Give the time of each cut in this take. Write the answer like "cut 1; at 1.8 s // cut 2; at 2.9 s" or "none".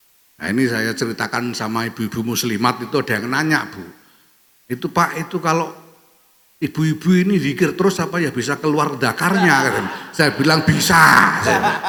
none